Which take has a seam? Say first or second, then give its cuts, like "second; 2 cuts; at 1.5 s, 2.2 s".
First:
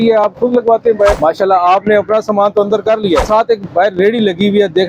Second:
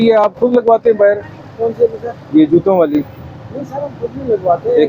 first; 2 cuts; at 1.2 s, 3.3 s